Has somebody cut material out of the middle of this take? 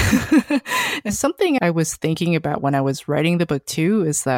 yes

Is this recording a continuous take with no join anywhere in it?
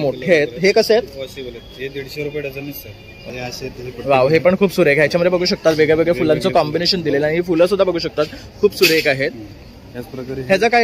no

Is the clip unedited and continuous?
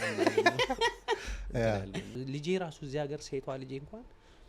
no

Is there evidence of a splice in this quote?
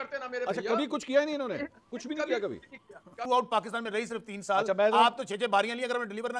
yes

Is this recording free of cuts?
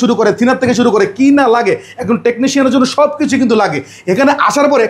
yes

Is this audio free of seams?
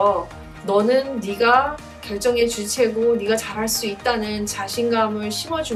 yes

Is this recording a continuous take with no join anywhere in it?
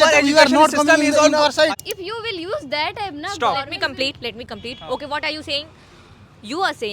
no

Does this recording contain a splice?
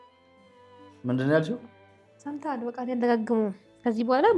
yes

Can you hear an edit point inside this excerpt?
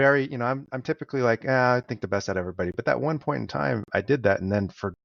no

